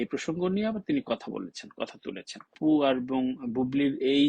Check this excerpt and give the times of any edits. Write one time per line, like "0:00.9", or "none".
0:02.6